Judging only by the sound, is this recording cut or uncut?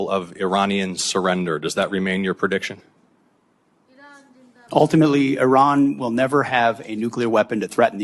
uncut